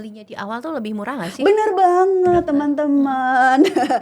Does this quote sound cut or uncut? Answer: uncut